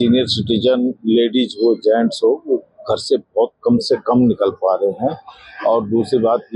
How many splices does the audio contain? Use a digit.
0